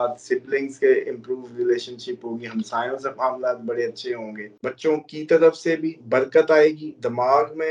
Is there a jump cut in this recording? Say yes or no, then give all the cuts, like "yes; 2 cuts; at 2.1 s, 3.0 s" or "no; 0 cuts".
yes; 1 cut; at 4.4 s